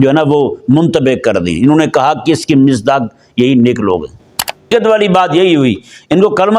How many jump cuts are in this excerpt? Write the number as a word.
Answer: one